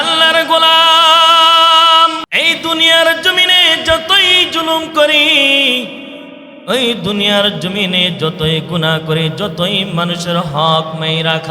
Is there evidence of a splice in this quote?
yes; 1 cut; at 2.3 s

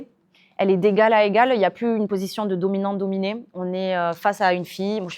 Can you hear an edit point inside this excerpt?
no; 0 cuts

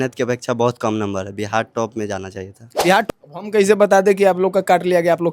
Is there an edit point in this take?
yes; 1 cut; at 3.1 s

